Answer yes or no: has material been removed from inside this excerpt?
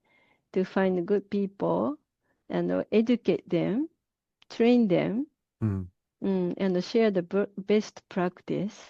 no